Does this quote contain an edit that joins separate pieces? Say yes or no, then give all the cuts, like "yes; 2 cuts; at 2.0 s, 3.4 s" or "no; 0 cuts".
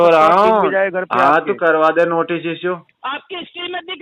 yes; 1 cut; at 2.9 s